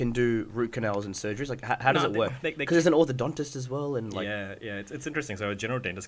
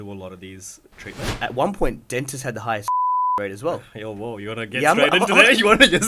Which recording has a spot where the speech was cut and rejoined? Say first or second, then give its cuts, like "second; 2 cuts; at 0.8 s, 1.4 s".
second; 1 cut; at 1.3 s